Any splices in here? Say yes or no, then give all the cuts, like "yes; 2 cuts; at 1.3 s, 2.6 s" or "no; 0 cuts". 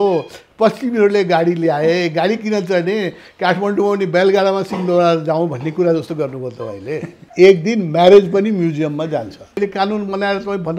yes; 2 cuts; at 7.2 s, 9.6 s